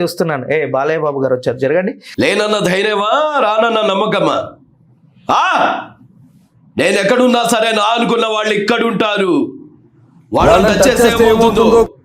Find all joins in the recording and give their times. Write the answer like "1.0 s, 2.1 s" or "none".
2.0 s